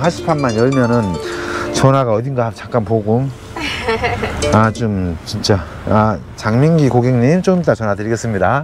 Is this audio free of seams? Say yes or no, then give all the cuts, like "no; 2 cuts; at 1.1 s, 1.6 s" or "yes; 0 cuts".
yes; 0 cuts